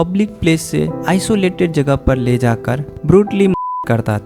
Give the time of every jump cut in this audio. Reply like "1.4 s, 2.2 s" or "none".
none